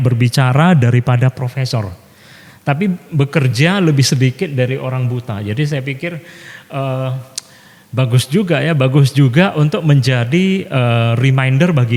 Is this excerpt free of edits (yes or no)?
yes